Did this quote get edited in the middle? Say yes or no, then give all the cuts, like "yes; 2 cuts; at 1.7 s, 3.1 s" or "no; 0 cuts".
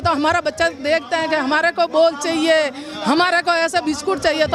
no; 0 cuts